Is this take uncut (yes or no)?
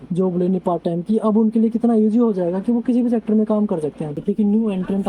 no